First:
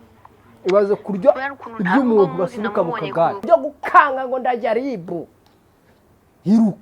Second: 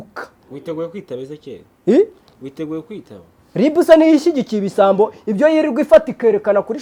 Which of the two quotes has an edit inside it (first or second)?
first